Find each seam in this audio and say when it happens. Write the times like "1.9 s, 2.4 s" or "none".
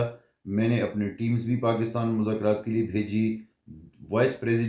none